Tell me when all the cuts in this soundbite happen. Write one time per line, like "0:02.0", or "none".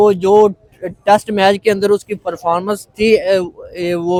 none